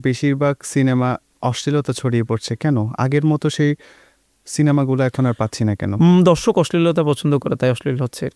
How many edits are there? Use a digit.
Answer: 0